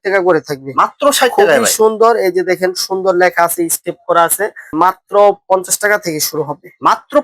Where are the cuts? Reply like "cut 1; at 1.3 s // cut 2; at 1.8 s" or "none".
cut 1; at 4.7 s